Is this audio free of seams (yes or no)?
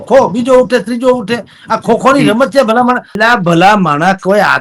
no